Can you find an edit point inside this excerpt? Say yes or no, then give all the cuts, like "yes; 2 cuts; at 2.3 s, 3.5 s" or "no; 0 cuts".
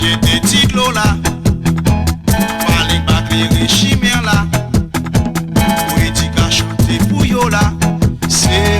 yes; 1 cut; at 1.1 s